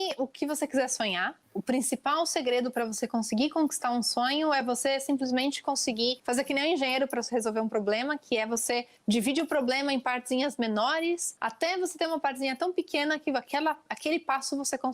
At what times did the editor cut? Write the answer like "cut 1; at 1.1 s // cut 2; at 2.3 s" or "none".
cut 1; at 6.2 s // cut 2; at 11.4 s